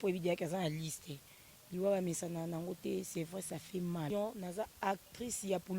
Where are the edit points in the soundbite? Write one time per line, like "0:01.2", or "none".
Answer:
0:04.1